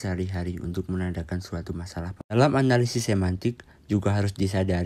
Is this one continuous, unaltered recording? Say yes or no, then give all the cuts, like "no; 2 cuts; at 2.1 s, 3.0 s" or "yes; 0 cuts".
no; 1 cut; at 2.1 s